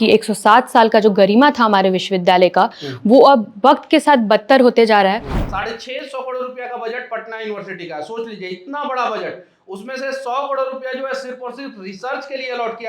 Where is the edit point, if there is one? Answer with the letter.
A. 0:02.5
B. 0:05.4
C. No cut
B